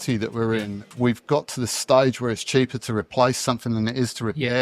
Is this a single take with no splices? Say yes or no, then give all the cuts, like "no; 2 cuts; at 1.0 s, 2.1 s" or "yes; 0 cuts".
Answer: no; 1 cut; at 0.9 s